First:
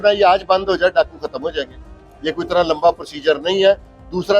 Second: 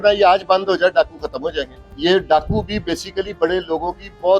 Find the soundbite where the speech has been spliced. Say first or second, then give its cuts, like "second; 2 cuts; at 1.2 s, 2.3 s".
second; 1 cut; at 1.8 s